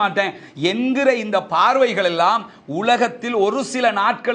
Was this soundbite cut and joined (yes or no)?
no